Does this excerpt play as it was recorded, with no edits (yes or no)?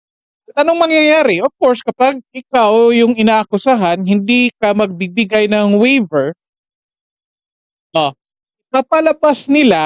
yes